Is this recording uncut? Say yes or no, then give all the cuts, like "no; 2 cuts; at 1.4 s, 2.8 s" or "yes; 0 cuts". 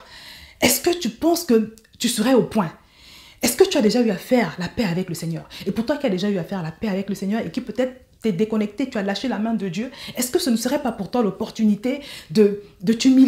yes; 0 cuts